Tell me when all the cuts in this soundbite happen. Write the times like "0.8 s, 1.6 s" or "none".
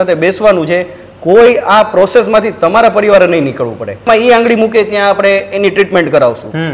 4.1 s